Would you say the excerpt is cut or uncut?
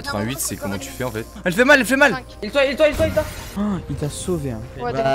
cut